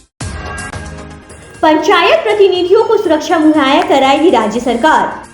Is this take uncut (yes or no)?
no